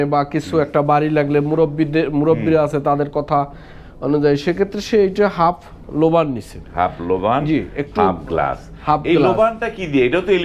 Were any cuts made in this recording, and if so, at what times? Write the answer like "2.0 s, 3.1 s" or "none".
none